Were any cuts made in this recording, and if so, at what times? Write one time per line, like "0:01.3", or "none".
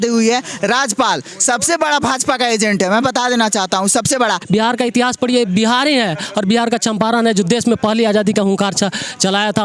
0:04.4